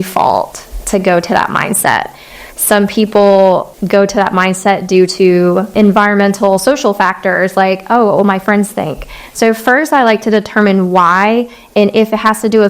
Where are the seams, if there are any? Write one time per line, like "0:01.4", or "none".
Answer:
0:03.7
0:05.7

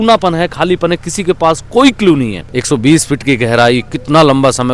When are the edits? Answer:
0:02.4

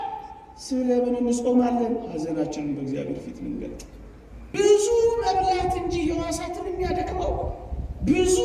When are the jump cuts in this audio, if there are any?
0:04.6

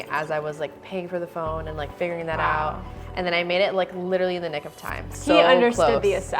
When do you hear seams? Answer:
0:05.1

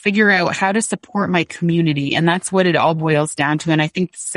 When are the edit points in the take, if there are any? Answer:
none

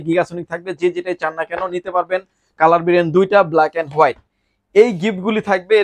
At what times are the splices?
none

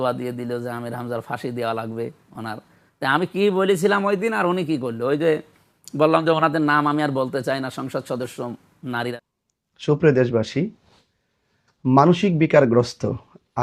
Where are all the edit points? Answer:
0:09.1

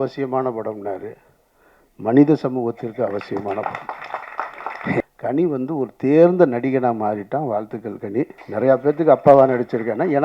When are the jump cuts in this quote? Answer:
0:05.0
0:08.4

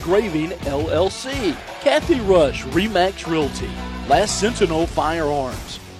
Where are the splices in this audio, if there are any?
0:01.7

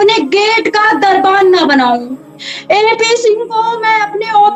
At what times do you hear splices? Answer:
none

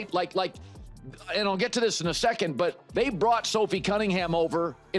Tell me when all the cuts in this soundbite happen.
none

